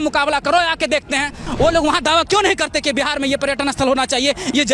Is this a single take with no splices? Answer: no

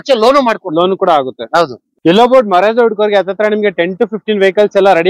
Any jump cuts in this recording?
yes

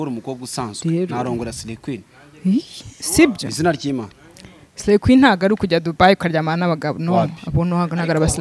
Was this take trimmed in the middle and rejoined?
no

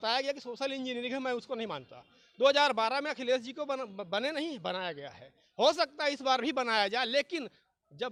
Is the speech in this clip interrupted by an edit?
no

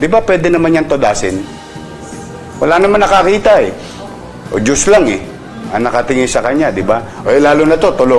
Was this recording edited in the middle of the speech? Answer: no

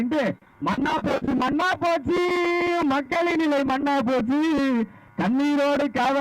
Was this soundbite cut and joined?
no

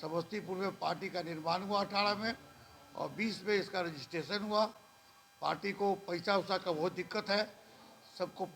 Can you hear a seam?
no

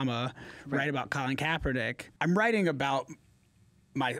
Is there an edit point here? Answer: yes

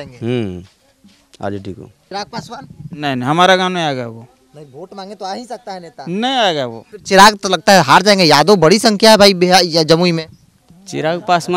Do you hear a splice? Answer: yes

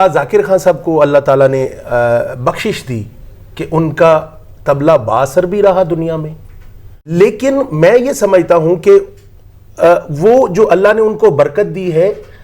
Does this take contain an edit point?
yes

